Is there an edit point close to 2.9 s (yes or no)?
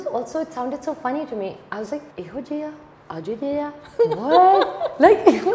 yes